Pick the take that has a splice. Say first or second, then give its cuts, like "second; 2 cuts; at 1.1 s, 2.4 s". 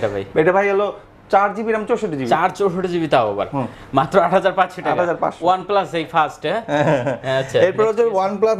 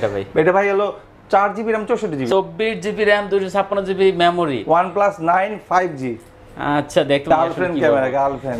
second; 2 cuts; at 2.3 s, 7.3 s